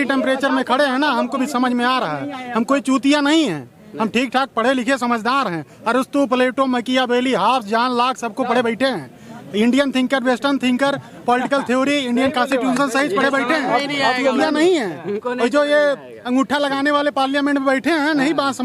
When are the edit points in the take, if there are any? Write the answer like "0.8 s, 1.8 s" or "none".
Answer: none